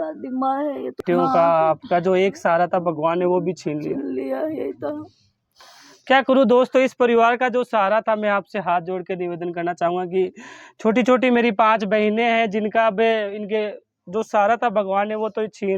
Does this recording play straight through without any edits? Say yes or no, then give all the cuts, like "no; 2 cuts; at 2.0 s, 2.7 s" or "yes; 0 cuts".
no; 1 cut; at 1.0 s